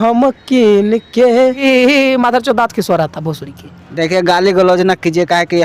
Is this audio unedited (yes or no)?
no